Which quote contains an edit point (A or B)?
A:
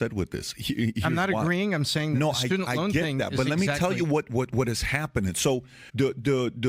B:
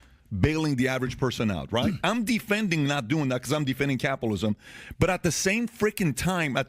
A